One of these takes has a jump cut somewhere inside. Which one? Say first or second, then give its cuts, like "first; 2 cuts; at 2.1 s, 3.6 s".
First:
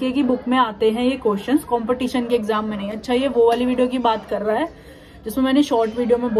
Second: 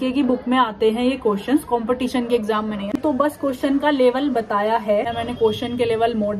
second; 2 cuts; at 3.0 s, 5.1 s